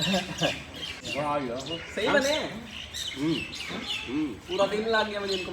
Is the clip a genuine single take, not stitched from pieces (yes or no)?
no